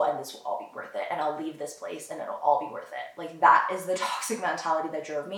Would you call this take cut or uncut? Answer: uncut